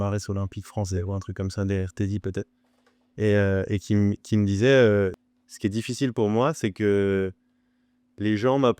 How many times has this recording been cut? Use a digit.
1